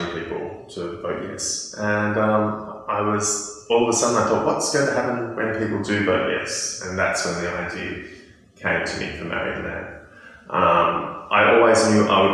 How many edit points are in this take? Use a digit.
0